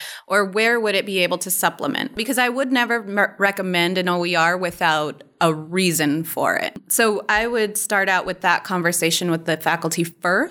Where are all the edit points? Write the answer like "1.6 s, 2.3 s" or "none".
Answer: 2.2 s, 6.8 s